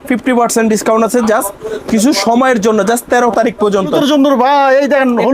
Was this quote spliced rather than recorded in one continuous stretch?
yes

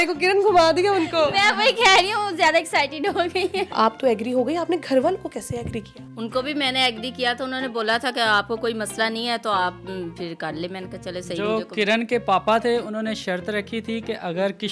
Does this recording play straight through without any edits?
yes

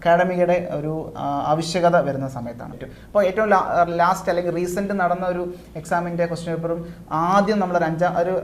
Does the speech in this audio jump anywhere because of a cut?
yes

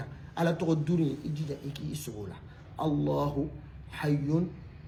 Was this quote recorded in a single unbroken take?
yes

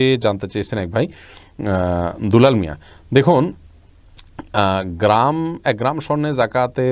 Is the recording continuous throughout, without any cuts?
yes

